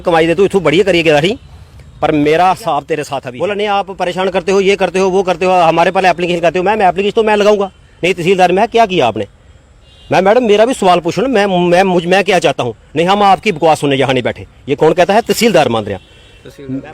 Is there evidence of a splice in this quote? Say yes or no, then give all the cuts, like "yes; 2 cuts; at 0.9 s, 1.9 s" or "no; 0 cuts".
yes; 1 cut; at 3.2 s